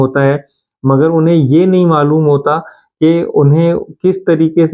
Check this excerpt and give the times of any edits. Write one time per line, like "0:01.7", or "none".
none